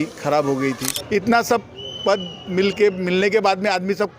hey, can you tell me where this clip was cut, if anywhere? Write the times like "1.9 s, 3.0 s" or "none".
0.9 s